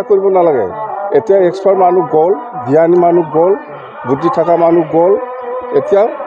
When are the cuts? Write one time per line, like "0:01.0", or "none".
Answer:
none